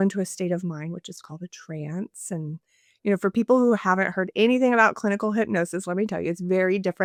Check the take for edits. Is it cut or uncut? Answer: uncut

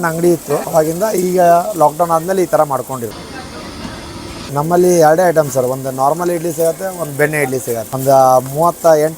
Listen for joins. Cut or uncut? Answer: cut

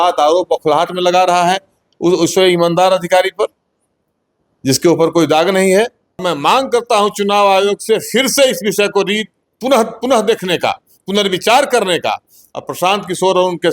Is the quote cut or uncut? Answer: cut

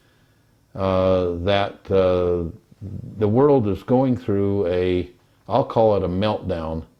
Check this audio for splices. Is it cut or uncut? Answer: uncut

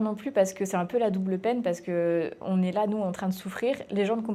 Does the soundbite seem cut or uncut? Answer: uncut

